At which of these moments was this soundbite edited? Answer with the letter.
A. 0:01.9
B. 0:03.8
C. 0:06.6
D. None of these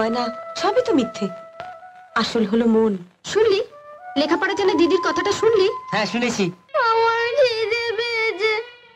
C